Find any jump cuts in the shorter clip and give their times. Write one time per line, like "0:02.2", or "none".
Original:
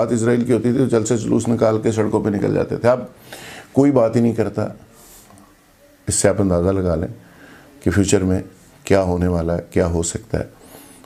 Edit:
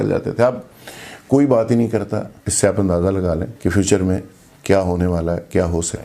0:02.4
0:03.5